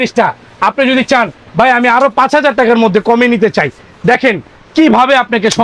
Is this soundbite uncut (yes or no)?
yes